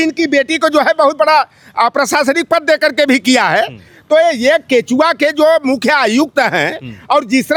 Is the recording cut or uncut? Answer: uncut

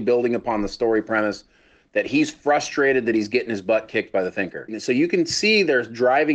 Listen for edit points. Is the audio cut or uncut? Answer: cut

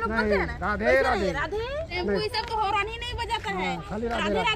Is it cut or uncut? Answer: cut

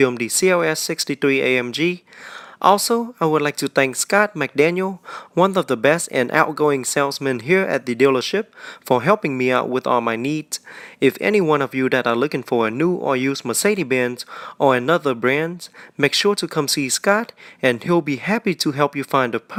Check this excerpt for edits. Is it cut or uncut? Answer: uncut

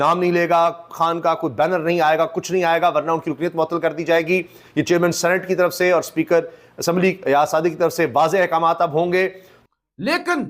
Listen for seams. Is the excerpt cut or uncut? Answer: uncut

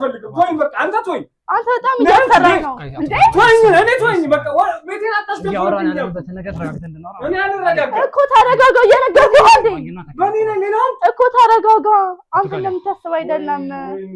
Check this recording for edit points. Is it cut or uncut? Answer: uncut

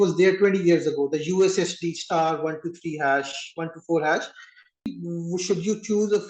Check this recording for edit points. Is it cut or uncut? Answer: cut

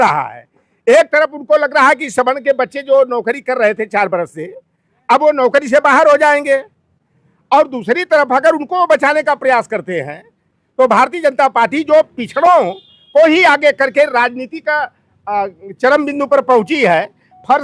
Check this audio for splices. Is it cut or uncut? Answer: uncut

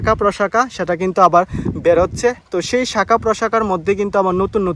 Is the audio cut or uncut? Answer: uncut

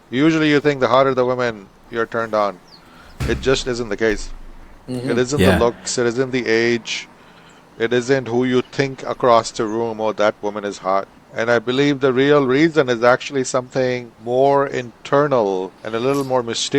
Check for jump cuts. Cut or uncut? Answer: cut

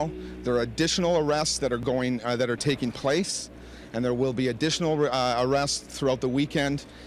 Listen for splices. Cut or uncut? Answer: uncut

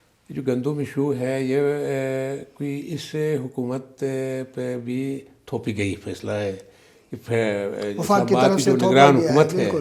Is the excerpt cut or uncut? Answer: uncut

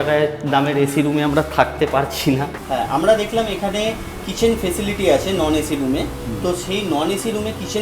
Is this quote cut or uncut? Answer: cut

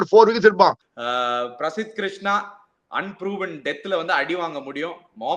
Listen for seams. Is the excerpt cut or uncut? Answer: cut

